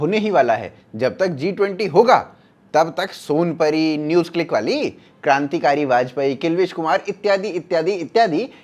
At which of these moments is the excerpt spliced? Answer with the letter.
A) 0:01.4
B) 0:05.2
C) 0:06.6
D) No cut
D